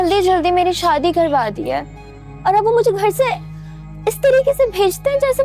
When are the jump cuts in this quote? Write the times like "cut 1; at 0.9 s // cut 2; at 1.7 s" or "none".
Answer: none

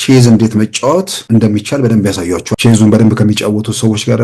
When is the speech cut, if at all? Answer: cut 1; at 1.2 s // cut 2; at 2.5 s

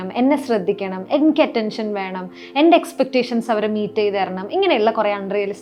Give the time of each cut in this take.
none

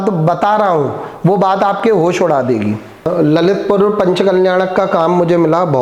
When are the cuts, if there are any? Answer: cut 1; at 3.0 s

